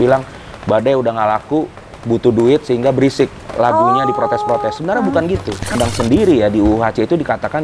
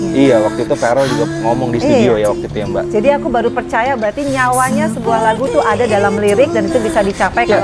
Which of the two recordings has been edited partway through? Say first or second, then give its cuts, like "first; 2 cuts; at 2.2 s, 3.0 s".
first; 1 cut; at 5.7 s